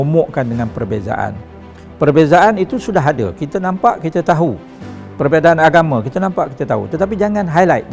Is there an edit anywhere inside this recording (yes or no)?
no